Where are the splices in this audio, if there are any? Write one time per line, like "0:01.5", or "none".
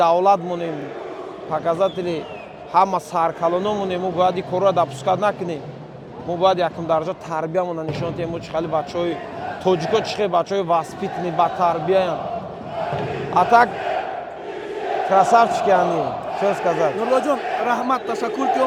none